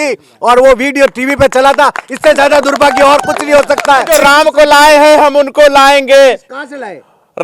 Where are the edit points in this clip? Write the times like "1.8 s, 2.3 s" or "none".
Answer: 4.1 s